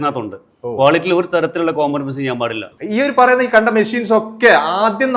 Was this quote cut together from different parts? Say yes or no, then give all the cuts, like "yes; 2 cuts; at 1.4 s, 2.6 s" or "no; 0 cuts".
yes; 1 cut; at 2.7 s